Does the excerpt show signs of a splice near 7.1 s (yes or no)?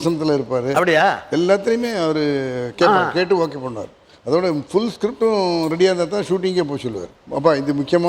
yes